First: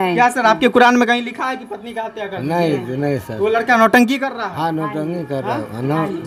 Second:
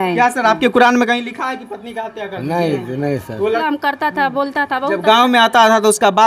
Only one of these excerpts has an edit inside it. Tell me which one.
second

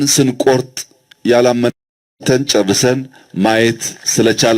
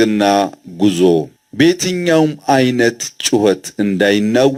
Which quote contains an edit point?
first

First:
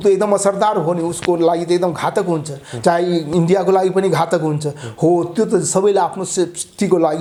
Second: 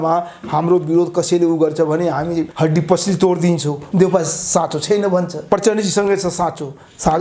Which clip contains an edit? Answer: second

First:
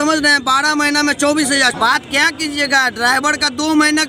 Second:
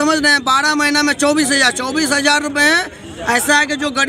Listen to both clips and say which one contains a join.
first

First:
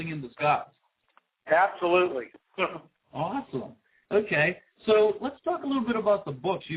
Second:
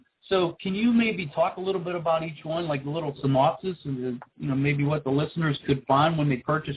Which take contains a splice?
first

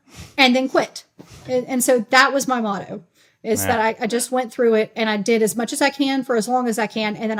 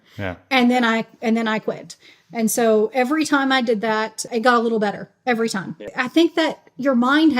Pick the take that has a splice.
second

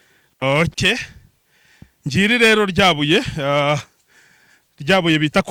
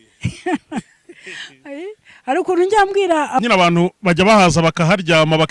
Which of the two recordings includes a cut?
second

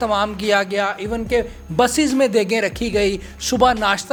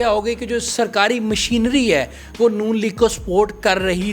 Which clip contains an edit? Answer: second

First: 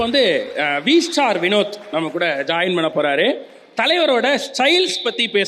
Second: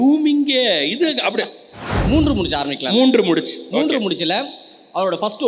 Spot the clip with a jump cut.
second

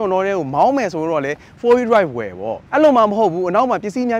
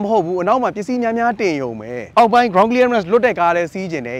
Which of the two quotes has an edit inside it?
second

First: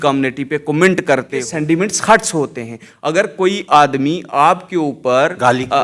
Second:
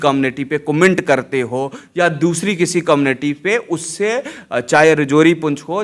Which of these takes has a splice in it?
first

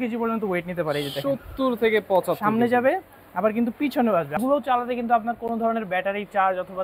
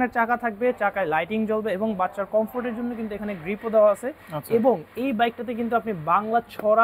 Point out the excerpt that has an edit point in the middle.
first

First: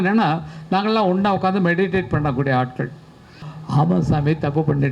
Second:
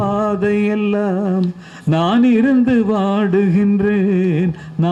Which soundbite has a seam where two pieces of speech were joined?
first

